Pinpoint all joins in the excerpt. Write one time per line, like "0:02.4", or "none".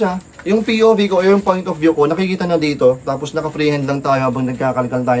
none